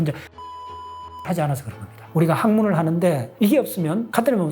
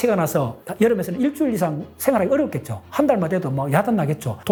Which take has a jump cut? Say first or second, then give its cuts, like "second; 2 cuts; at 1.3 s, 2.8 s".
first; 1 cut; at 2.1 s